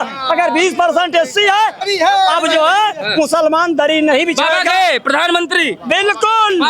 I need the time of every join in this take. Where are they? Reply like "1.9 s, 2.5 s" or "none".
1.8 s